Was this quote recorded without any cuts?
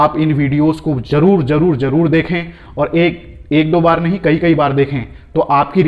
yes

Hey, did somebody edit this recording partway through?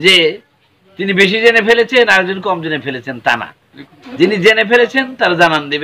no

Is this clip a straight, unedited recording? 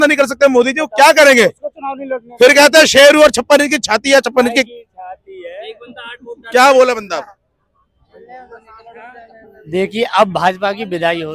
yes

